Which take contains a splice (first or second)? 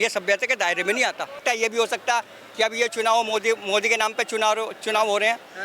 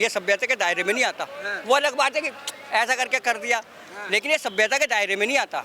first